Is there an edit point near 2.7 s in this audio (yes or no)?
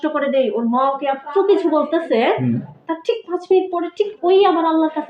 no